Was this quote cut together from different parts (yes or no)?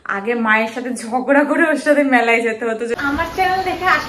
yes